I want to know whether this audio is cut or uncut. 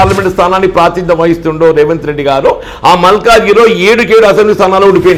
uncut